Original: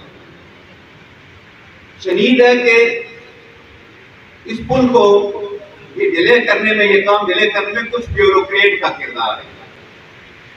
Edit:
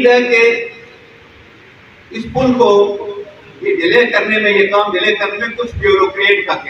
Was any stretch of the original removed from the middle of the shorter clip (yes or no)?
no